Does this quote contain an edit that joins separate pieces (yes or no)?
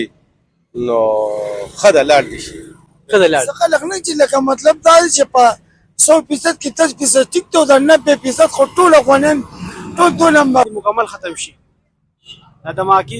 yes